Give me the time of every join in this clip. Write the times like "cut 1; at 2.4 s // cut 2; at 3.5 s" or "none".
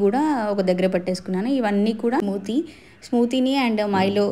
cut 1; at 2.2 s